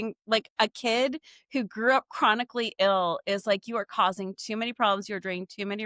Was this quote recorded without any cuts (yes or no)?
yes